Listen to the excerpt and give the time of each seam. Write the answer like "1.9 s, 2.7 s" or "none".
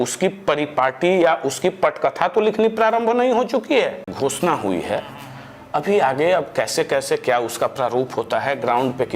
4.1 s